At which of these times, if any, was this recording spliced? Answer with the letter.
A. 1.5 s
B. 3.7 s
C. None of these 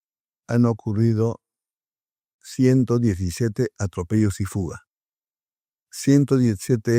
C